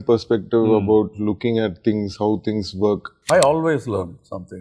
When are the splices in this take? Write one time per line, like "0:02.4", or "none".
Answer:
0:03.1